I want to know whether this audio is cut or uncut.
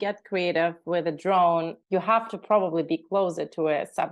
cut